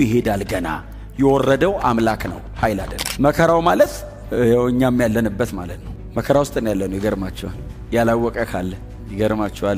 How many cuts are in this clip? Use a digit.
1